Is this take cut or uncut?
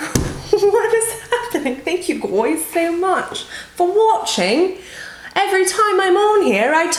uncut